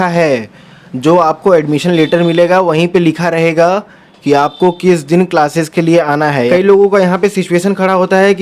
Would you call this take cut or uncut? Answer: cut